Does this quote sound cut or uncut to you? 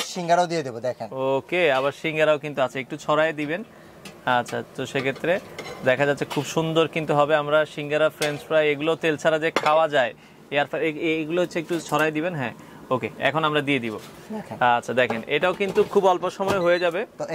uncut